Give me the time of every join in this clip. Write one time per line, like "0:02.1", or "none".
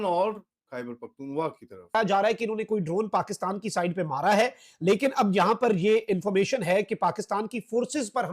0:01.9

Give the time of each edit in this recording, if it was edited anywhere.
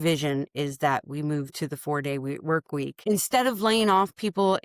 0:02.9

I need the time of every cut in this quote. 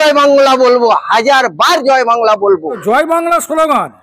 none

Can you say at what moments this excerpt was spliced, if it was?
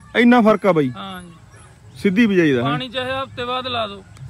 none

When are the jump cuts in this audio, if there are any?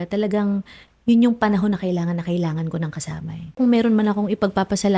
0:03.6

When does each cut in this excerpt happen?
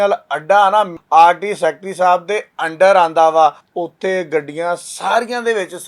0:01.0
0:03.6

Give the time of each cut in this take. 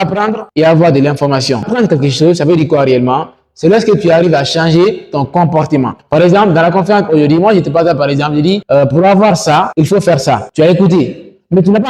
none

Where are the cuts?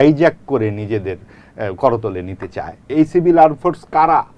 0:02.9

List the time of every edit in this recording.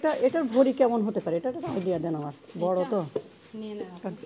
none

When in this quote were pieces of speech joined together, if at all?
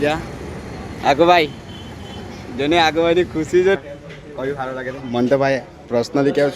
0:03.8

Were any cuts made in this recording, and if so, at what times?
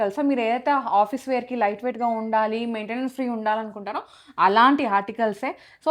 none

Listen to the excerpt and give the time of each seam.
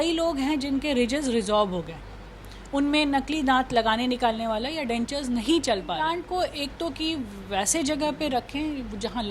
0:06.1

